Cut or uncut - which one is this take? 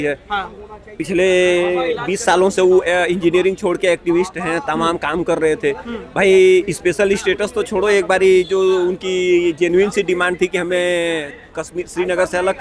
uncut